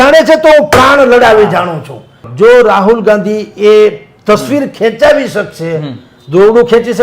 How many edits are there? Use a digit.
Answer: 1